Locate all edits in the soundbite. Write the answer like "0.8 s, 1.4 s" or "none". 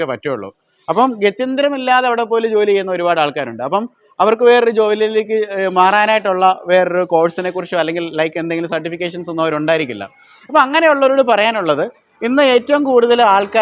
none